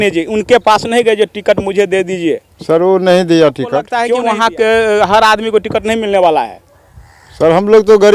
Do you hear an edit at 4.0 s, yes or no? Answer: yes